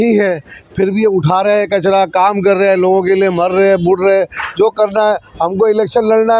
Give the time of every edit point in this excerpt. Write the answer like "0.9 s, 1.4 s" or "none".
none